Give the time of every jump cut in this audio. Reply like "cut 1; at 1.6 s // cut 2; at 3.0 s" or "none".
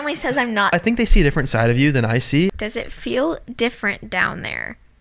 cut 1; at 2.5 s